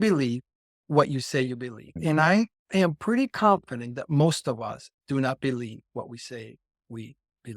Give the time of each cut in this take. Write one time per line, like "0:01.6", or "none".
0:01.9